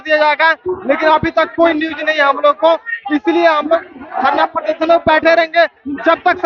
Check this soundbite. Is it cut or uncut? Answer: uncut